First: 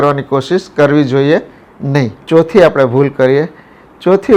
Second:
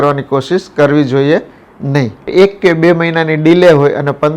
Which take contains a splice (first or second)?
second